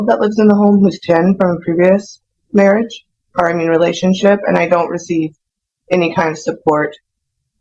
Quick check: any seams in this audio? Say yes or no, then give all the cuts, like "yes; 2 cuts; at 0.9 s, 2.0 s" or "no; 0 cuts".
no; 0 cuts